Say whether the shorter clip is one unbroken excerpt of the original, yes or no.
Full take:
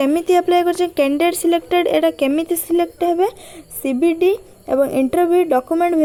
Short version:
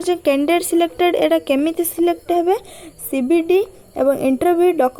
yes